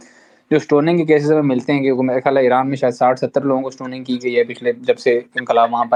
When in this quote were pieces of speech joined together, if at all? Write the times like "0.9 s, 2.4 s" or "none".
none